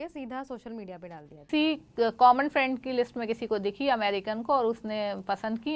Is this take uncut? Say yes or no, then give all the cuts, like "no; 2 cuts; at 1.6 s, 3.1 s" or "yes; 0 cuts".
no; 1 cut; at 1.4 s